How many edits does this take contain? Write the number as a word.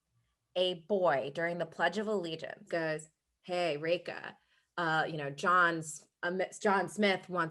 one